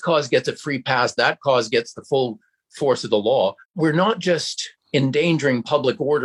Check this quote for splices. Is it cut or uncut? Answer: uncut